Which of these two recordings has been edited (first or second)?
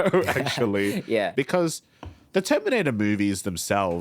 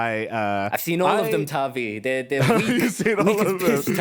first